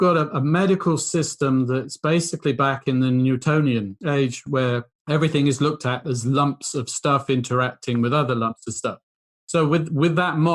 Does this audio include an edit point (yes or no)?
yes